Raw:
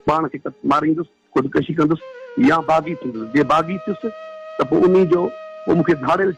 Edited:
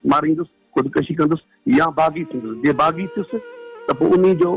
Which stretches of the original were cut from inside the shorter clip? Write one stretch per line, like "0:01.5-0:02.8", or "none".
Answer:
0:02.1-0:02.2

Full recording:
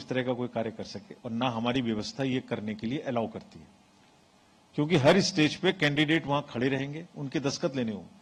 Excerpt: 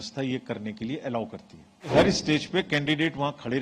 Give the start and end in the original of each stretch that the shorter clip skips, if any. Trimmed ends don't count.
0:03.9-0:05.0

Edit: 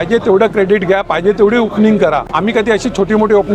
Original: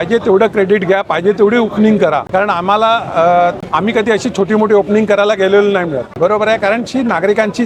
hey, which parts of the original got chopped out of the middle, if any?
0:02.2-0:03.6

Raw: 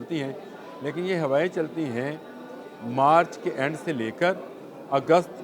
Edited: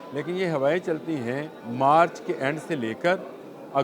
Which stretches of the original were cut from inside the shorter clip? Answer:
0:02.3-0:02.7

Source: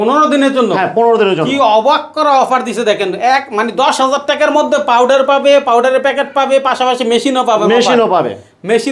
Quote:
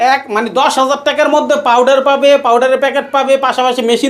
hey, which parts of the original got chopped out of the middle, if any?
none

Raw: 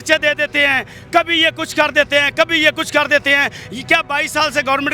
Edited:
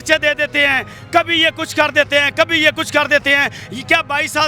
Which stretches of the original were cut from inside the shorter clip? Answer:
none

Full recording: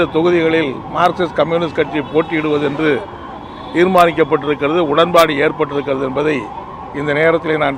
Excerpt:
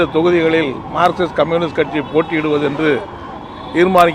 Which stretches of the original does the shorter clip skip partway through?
none

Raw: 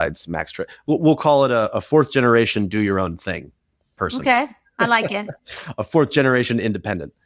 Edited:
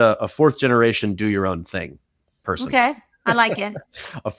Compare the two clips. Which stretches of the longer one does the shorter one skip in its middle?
none

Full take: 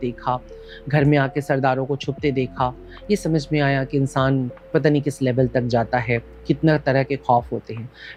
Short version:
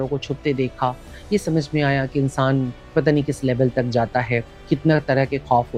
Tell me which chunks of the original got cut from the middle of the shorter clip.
none

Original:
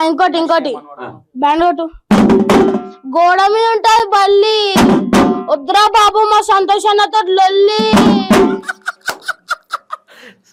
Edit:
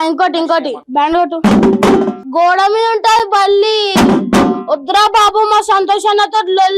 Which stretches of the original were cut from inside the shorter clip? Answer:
0:01.2-0:01.9
0:02.9-0:03.0

